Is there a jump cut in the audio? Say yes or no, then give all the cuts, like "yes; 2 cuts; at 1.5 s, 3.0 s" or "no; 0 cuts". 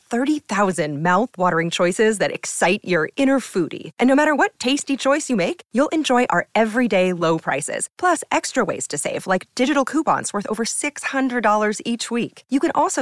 no; 0 cuts